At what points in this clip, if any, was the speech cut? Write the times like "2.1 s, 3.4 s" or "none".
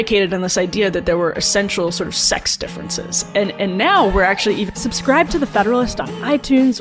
4.7 s